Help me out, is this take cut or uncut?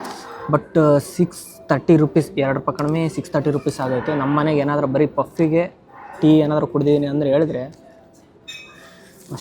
uncut